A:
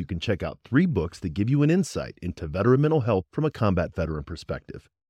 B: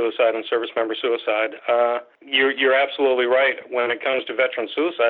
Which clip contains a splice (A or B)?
B